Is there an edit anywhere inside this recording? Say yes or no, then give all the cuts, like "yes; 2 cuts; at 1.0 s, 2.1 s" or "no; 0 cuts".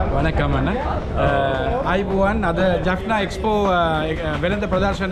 no; 0 cuts